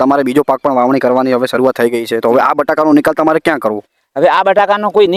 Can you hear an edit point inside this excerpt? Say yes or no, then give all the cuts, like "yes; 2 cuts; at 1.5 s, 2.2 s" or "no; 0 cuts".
no; 0 cuts